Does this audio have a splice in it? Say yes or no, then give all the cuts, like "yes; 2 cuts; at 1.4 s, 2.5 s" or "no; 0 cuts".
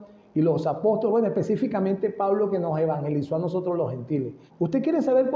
yes; 1 cut; at 4.4 s